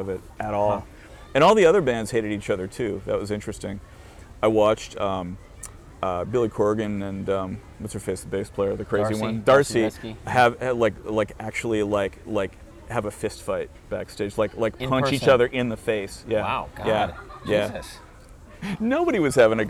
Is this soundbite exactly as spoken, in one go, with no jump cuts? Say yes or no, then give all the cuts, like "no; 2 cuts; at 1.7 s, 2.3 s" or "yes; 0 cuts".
no; 1 cut; at 18.6 s